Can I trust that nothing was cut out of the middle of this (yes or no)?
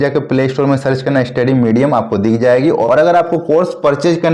no